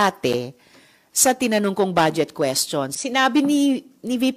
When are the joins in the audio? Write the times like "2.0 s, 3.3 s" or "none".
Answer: 2.9 s